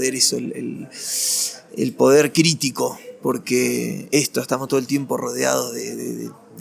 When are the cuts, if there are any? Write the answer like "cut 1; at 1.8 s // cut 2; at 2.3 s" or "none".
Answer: none